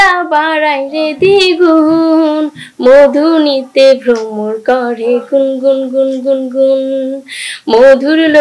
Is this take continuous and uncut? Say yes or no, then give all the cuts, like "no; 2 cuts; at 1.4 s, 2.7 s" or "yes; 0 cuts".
yes; 0 cuts